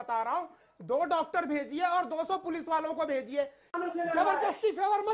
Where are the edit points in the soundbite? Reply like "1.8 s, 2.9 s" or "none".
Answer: 3.7 s